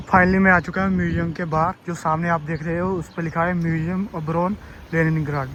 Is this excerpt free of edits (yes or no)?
yes